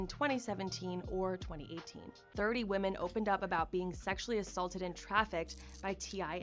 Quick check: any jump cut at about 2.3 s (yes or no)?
yes